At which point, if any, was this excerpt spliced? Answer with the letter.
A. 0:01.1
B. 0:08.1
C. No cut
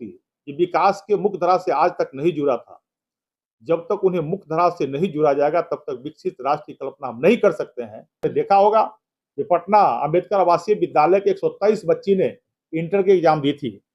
B